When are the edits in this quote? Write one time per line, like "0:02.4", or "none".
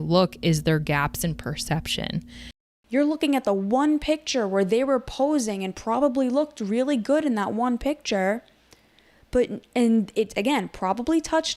0:02.6